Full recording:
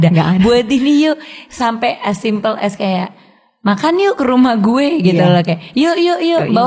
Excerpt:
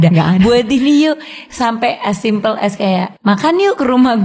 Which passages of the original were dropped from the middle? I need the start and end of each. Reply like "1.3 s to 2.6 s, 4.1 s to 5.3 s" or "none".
3.1 s to 3.5 s